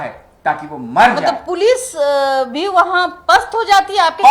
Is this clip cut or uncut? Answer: uncut